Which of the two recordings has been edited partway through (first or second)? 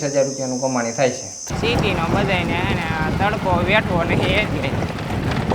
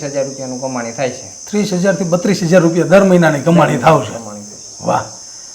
first